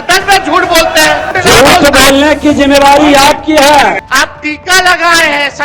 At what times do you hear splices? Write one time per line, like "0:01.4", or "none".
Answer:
0:01.3
0:04.0